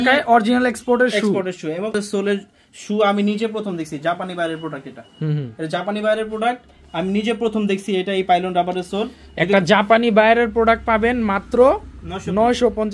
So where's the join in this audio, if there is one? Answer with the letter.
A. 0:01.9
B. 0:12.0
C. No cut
A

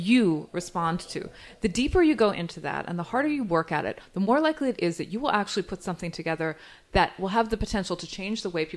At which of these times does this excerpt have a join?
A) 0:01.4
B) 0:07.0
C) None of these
C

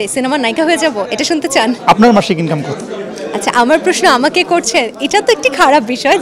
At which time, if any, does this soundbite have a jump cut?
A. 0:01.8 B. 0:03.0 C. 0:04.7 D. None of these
A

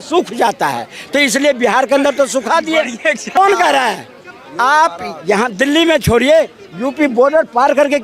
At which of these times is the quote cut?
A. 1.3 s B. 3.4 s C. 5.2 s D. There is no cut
B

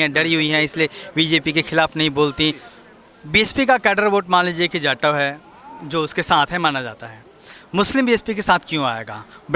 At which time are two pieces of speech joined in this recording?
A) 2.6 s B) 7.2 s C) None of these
A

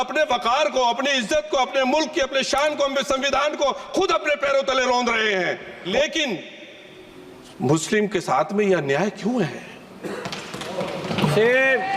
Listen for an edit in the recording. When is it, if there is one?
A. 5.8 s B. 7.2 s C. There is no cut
A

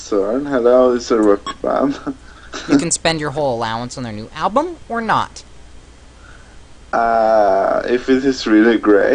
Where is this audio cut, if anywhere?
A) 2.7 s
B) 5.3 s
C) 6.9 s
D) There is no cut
B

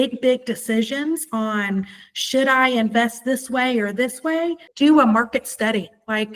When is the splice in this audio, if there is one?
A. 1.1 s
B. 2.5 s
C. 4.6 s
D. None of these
C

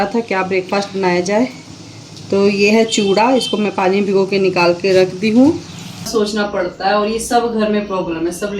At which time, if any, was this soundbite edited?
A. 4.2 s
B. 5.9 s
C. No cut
B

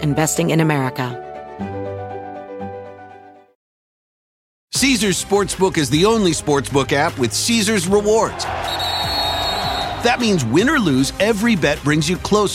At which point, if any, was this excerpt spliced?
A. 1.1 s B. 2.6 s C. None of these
A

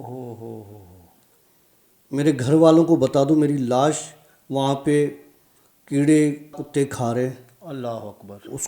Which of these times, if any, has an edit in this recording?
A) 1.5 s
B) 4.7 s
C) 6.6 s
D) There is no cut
C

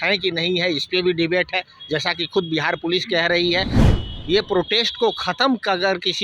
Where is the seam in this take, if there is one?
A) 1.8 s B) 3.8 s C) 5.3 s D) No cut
B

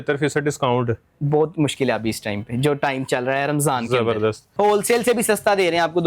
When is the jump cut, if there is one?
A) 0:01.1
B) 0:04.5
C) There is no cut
B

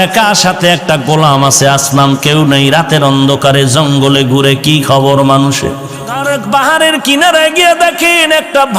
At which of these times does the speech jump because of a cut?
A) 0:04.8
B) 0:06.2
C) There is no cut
B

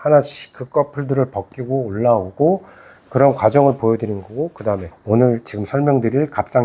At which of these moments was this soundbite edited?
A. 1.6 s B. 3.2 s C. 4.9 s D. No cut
C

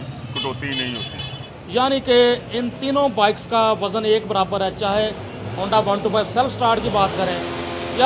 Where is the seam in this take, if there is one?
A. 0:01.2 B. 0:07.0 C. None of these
A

